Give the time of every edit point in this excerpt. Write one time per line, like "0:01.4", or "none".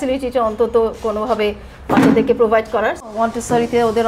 0:03.1